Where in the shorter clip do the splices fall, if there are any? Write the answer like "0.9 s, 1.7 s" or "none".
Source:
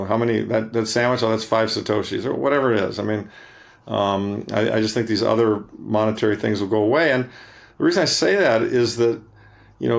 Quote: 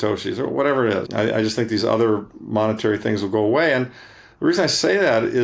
1.1 s